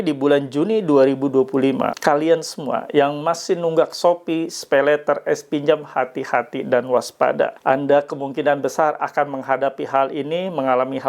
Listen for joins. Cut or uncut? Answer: cut